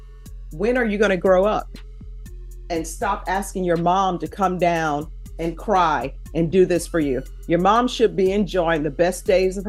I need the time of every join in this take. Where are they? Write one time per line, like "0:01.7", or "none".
none